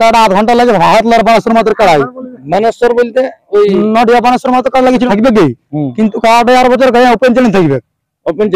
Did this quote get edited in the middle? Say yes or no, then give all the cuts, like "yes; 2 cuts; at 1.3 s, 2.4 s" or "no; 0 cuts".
yes; 1 cut; at 5.1 s